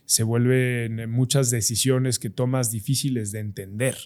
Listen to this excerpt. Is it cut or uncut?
uncut